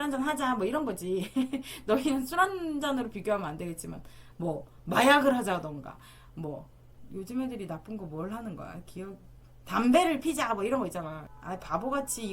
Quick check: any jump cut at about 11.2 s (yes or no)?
yes